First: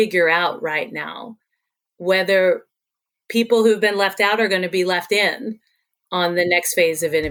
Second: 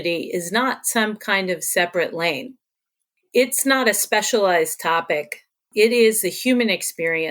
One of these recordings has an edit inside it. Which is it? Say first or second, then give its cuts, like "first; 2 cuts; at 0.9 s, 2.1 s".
second; 1 cut; at 3.2 s